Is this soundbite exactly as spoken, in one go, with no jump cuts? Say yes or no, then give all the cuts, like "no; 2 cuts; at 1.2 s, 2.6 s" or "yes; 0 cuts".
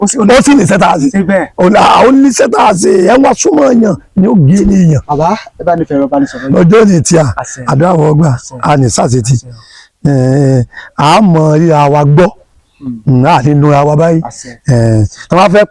yes; 0 cuts